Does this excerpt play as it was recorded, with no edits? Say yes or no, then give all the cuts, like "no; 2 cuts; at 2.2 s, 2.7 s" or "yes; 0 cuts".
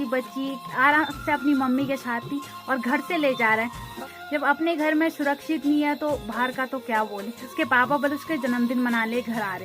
no; 2 cuts; at 4.0 s, 7.4 s